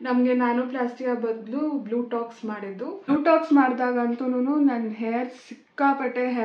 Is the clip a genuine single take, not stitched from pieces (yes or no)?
no